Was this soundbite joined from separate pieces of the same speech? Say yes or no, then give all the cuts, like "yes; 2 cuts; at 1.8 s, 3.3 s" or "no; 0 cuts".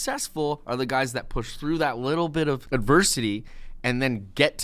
yes; 1 cut; at 2.6 s